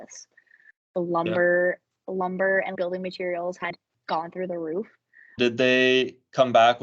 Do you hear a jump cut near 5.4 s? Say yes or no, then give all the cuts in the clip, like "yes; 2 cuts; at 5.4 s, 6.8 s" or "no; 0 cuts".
yes; 2 cuts; at 3.7 s, 5.4 s